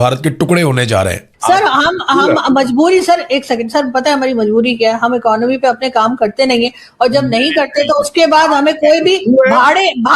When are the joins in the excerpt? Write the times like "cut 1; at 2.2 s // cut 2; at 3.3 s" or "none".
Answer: cut 1; at 1.3 s